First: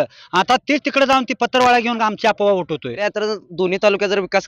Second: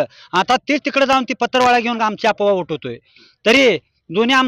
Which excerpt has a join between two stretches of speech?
first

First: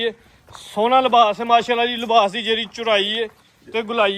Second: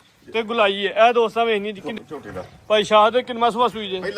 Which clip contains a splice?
second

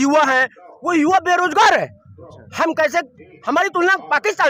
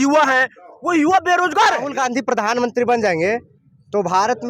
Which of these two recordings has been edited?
second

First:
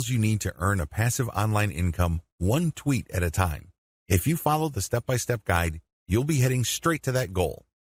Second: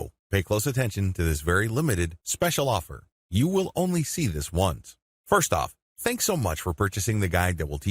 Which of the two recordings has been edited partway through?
second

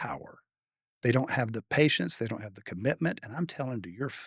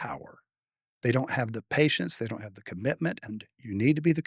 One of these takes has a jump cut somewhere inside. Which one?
second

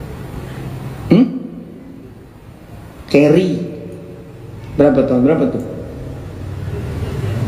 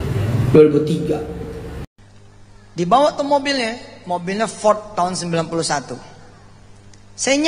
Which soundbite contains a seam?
second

